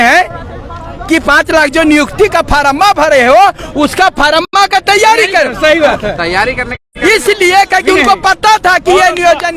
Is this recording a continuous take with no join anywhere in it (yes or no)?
yes